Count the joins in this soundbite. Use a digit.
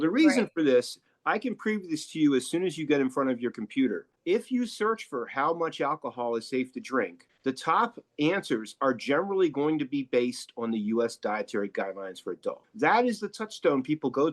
1